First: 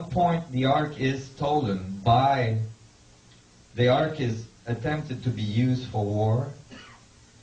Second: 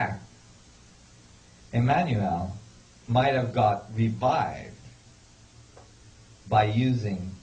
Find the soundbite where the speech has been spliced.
first; 1 cut; at 0.9 s

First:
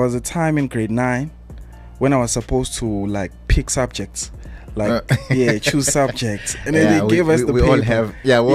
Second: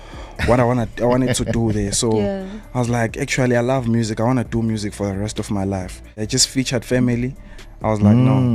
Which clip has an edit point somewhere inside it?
second; 1 cut; at 6.2 s

